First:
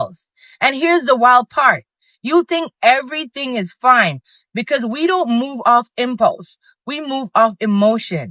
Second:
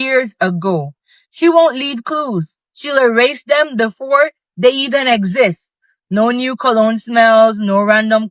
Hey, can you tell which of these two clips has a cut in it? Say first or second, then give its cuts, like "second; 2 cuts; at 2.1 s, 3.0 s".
first; 1 cut; at 1.0 s